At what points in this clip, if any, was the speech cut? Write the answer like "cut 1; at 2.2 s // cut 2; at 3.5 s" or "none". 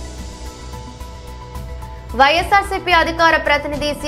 cut 1; at 0.9 s